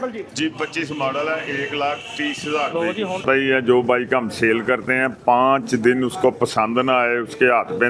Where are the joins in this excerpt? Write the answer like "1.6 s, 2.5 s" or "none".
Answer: 3.2 s

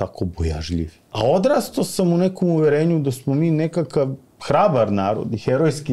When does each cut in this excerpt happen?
1.0 s

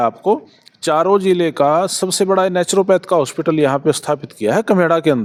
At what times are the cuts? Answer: none

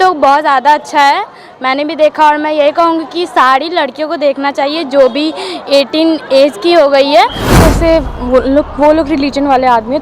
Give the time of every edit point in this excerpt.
7.5 s

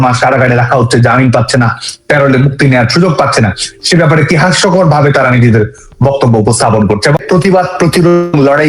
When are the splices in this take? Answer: 7.2 s

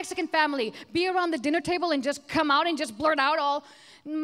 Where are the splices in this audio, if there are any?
none

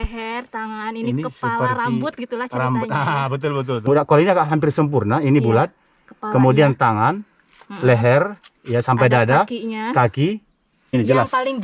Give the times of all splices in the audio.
3.9 s, 10.9 s

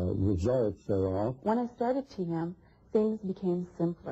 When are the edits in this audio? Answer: 1.4 s

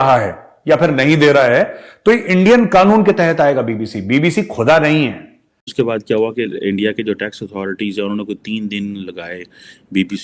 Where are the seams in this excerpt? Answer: 5.7 s

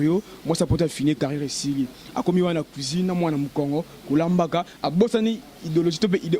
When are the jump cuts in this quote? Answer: none

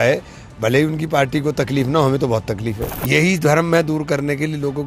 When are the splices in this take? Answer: 2.9 s

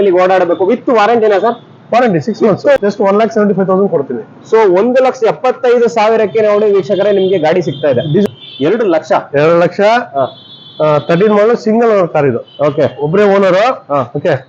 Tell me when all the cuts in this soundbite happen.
2.8 s, 8.2 s

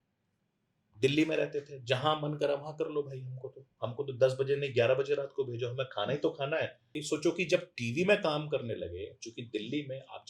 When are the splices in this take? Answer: 7.0 s

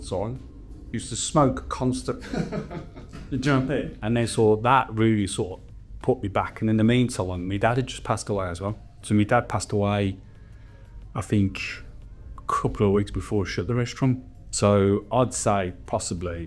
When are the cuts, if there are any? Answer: 3.9 s

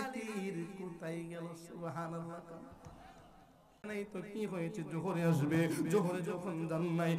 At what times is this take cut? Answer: 3.9 s

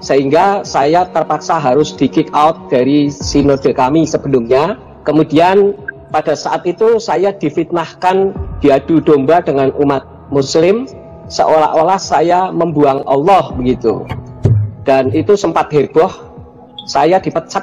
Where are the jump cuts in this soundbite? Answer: none

